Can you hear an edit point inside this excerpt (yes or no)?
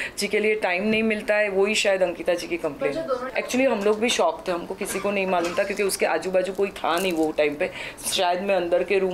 no